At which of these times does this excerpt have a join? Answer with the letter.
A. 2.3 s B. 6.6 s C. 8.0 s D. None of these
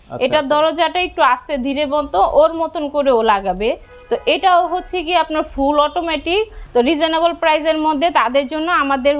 B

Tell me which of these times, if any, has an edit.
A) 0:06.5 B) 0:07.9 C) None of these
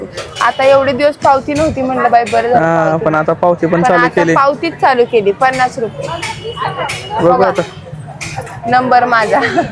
C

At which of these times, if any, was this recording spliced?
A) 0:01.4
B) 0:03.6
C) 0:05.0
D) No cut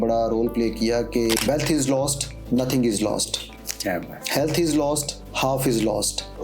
A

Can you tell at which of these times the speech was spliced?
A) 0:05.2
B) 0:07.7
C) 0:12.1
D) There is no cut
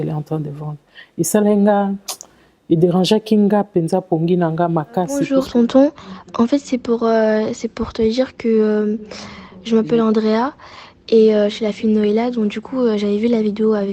A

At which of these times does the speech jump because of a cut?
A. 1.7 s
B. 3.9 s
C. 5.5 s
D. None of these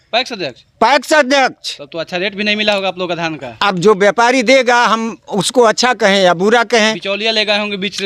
D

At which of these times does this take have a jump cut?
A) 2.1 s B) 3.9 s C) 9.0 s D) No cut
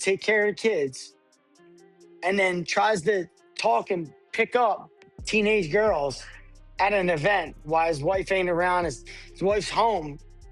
D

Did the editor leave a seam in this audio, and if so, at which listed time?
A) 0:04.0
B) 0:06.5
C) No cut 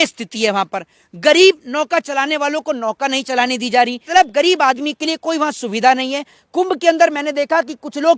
A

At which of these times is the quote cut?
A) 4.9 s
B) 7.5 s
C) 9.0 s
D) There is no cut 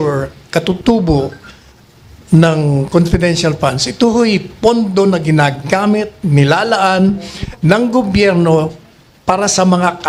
D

